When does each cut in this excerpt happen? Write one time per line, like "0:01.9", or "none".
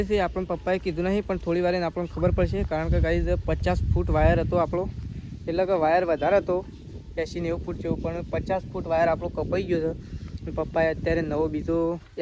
none